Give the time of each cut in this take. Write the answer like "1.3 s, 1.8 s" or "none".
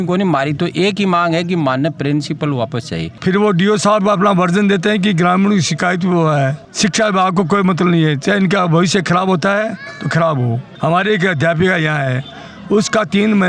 3.1 s, 6.6 s, 10.7 s